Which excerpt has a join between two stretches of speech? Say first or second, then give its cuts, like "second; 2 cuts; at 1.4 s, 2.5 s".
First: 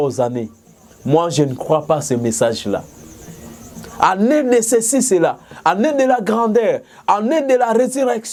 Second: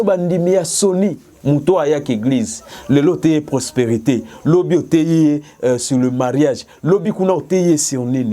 second; 1 cut; at 1.3 s